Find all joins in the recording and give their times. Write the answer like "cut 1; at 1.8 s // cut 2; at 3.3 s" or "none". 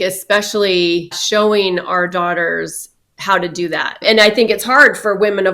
cut 1; at 1.1 s // cut 2; at 4.0 s